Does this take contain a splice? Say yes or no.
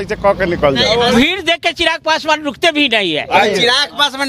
yes